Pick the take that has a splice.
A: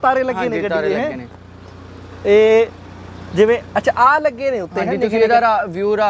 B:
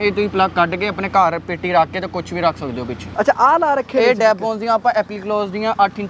B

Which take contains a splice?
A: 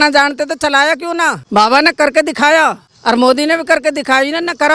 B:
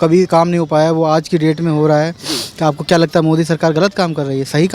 A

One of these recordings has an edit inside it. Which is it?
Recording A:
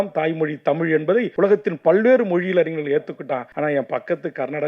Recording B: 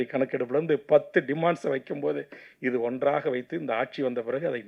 A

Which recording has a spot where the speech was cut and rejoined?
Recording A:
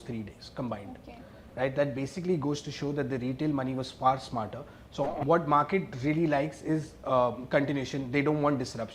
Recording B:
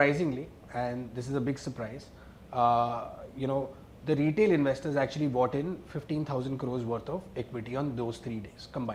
A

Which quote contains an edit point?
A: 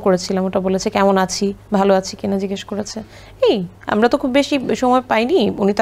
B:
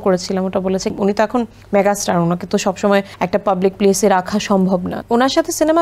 B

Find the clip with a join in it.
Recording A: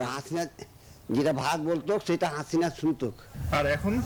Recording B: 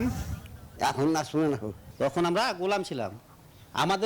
B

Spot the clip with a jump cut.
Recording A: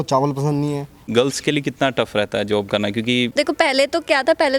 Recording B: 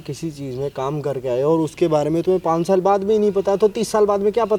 A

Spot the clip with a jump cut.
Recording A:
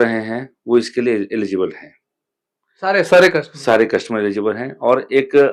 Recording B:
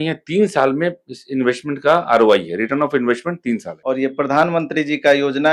B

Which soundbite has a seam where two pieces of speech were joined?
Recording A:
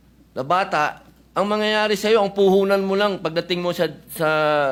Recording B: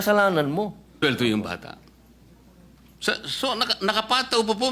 B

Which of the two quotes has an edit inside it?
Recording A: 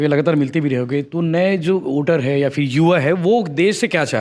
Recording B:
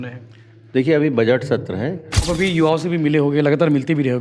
B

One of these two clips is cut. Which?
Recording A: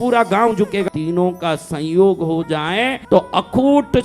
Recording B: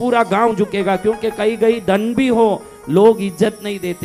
A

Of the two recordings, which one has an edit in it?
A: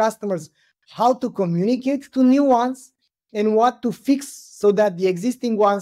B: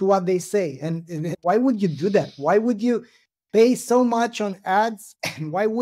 B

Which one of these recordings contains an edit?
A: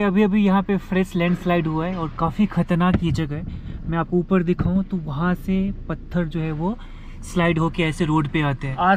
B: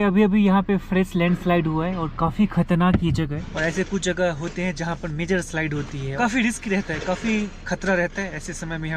B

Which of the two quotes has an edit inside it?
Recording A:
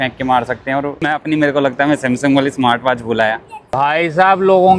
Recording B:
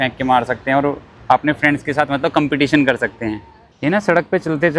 A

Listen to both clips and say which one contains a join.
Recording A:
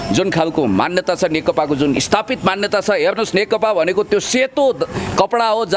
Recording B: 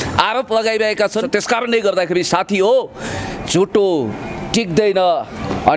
B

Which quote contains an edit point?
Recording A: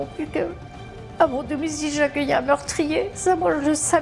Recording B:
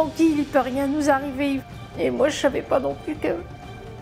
B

